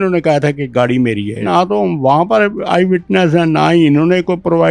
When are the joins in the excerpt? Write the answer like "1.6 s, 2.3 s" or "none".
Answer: 1.4 s